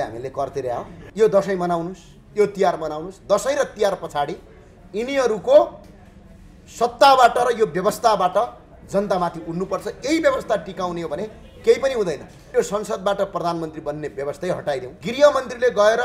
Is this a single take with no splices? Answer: no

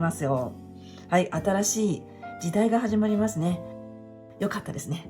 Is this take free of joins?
no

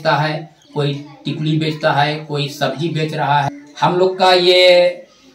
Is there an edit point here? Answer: yes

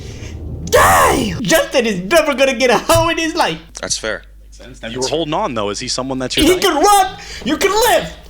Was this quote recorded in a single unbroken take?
no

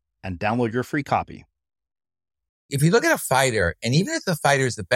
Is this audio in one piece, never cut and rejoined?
no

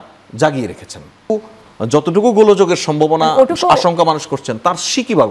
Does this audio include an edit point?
yes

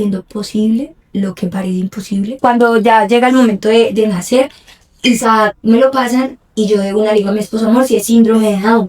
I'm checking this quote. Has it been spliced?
yes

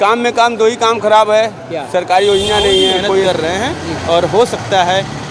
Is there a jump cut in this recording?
yes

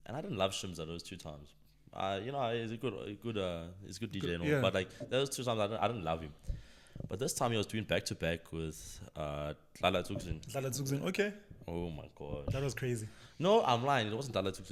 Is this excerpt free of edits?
yes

